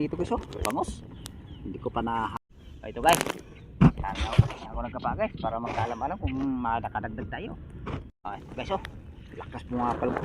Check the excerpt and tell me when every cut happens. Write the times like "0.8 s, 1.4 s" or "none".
2.3 s, 8.2 s